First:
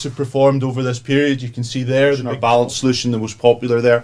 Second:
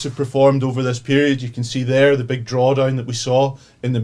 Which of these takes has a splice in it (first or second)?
first